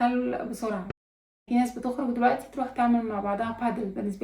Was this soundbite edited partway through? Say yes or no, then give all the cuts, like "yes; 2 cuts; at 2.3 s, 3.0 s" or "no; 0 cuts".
yes; 1 cut; at 0.9 s